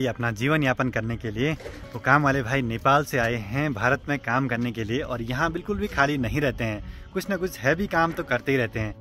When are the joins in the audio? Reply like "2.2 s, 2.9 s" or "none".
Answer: none

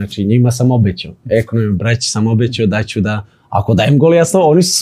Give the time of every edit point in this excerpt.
none

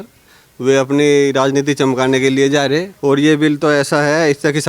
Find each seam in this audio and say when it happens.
2.9 s

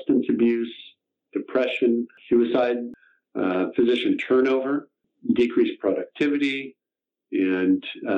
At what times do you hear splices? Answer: 2.2 s, 2.9 s, 5.1 s

